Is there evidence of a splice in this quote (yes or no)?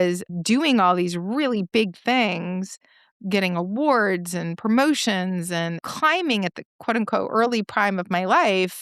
no